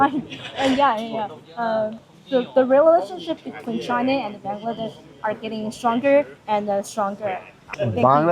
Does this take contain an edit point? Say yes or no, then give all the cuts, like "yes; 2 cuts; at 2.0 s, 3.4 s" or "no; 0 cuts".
no; 0 cuts